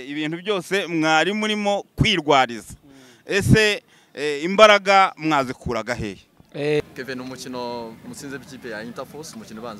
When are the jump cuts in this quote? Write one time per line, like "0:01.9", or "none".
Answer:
0:06.8